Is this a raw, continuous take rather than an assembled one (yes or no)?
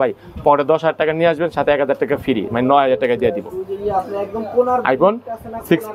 yes